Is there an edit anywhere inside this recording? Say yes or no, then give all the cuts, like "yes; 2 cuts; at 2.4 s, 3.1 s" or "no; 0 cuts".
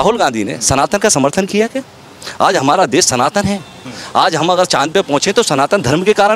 no; 0 cuts